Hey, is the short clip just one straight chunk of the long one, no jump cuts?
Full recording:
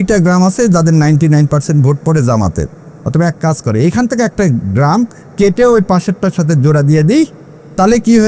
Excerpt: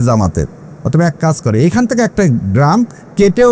yes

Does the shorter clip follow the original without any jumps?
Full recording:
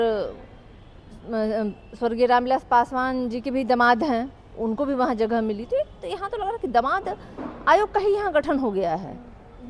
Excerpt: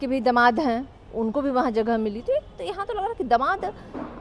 yes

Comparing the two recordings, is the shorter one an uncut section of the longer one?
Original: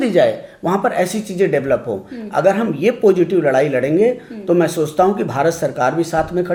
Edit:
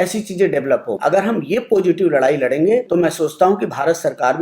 no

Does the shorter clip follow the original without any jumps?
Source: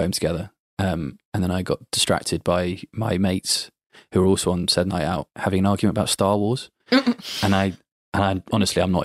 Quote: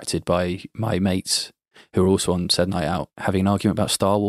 yes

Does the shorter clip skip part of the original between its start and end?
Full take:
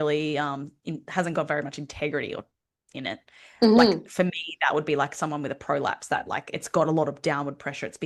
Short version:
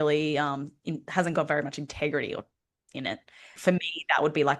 yes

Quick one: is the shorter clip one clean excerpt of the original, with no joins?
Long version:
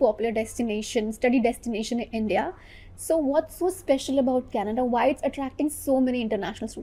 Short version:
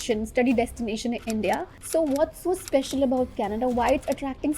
no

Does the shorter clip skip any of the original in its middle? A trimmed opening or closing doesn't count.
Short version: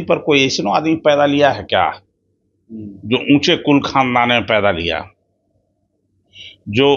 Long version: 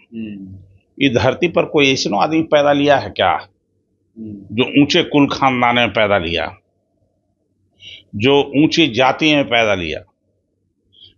no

